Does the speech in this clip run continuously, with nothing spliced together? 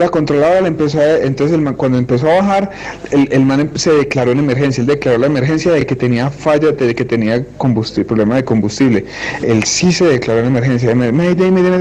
yes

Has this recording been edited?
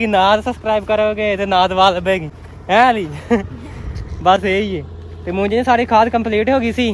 no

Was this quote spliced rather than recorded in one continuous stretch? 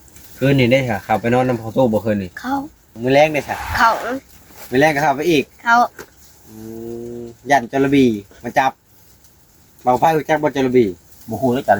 yes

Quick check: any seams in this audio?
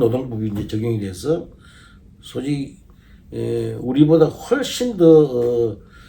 no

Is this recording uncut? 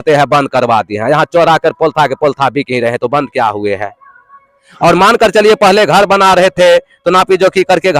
yes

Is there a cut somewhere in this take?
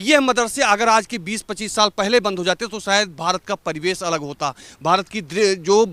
no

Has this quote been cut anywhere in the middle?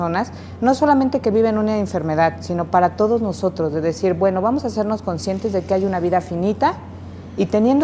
yes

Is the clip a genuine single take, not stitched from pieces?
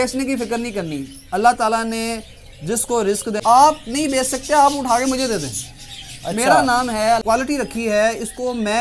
no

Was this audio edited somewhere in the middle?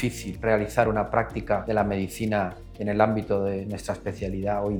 no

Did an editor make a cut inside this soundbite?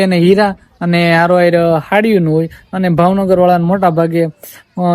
no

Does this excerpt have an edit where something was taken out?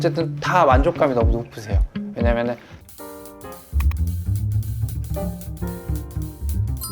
yes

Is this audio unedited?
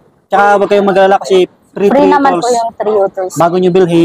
yes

